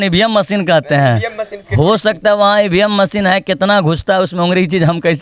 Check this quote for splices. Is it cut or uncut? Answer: uncut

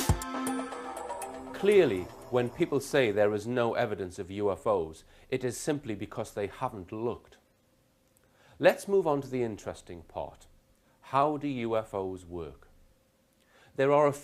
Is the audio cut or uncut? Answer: uncut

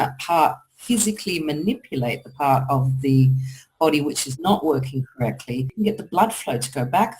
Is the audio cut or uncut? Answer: cut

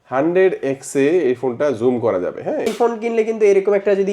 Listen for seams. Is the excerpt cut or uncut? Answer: cut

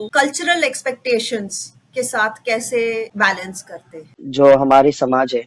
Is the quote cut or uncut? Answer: cut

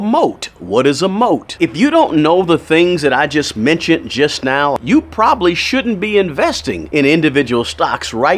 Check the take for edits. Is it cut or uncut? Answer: cut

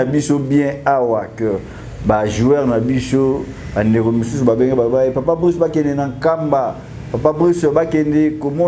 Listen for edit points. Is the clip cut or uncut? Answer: uncut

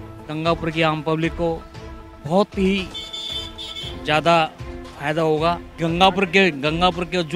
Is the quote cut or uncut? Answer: cut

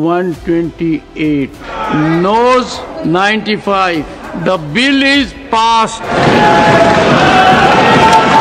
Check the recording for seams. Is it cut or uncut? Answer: cut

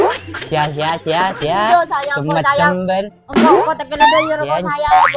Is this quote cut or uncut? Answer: uncut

